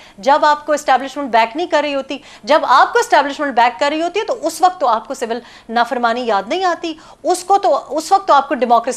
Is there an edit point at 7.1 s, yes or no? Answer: no